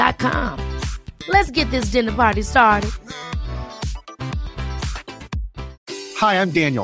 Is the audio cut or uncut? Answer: cut